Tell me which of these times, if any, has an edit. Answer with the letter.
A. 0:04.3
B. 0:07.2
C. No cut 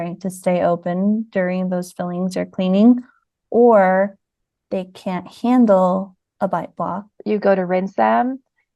B